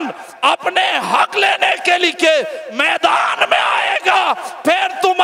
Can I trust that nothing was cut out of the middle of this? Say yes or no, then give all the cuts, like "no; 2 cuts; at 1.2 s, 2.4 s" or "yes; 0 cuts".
yes; 0 cuts